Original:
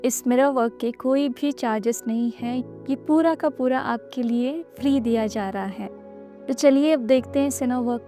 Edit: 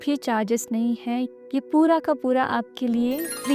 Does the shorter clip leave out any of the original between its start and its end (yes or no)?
no